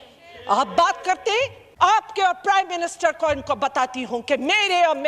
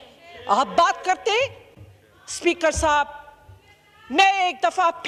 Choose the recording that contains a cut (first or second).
first